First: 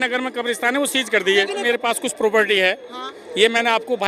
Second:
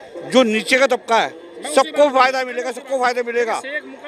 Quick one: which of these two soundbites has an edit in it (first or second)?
first